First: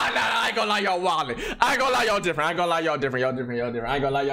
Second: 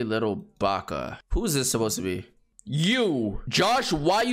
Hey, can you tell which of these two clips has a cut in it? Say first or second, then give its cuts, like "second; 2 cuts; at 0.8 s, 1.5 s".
second; 2 cuts; at 1.2 s, 3.4 s